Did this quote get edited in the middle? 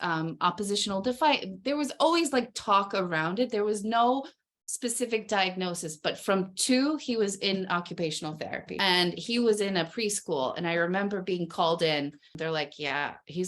yes; 2 cuts; at 8.7 s, 12.4 s

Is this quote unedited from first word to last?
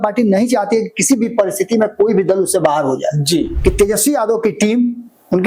no; 1 cut; at 3.5 s

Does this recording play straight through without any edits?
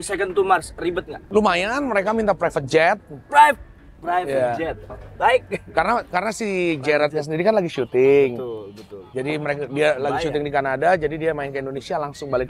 yes; 0 cuts

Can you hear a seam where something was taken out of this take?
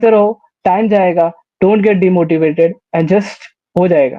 no; 0 cuts

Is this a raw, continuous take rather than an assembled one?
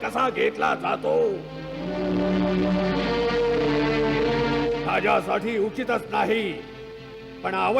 yes; 0 cuts

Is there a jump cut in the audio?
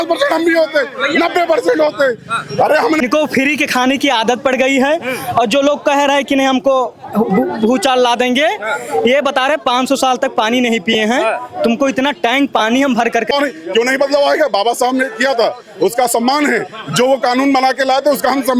yes; 2 cuts; at 3.0 s, 13.3 s

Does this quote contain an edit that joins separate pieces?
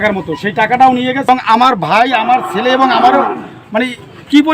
yes; 1 cut; at 1.3 s

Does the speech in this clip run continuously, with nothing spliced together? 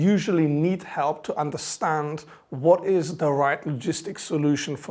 yes; 0 cuts

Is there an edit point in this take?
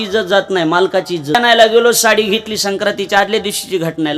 yes; 1 cut; at 1.7 s

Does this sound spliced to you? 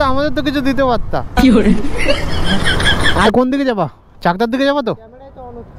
yes; 1 cut; at 3.3 s

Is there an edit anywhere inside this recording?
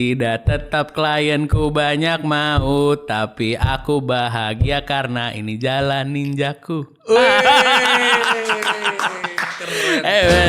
no; 0 cuts

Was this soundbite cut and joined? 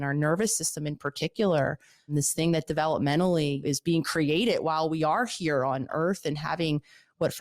yes; 3 cuts; at 2.1 s, 3.6 s, 5.9 s

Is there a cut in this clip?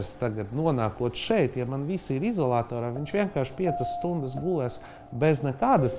no; 0 cuts

